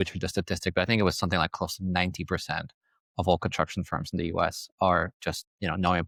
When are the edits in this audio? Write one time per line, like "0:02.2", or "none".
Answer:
none